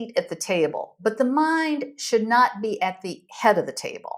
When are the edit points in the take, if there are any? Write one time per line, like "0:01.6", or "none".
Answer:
none